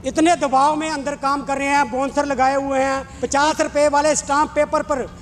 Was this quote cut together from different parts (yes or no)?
yes